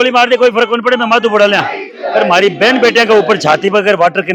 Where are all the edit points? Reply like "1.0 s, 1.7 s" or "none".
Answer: none